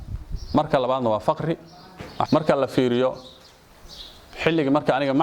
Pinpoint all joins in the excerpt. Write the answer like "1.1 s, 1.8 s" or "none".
2.3 s